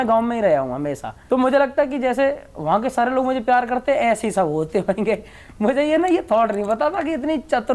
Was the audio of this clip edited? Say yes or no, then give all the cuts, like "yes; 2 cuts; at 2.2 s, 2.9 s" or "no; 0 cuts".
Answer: no; 0 cuts